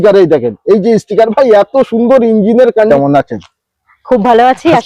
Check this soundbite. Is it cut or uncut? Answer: cut